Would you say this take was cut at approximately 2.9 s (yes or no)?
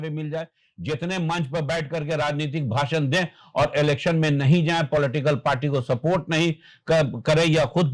no